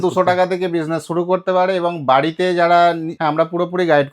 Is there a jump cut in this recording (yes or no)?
yes